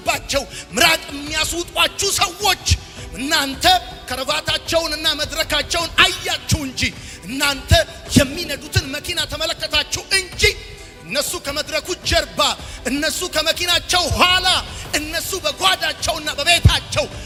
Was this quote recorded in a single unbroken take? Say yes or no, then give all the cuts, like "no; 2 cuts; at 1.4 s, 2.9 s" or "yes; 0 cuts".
yes; 0 cuts